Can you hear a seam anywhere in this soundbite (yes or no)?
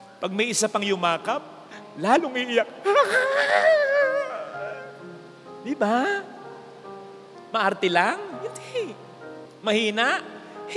no